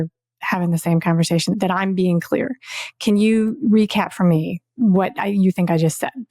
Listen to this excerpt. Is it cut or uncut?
cut